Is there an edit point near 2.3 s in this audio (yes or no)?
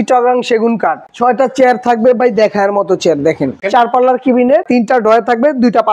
no